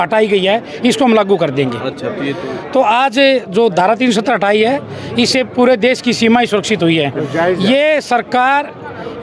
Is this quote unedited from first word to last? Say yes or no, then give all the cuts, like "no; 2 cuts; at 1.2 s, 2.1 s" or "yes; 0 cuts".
yes; 0 cuts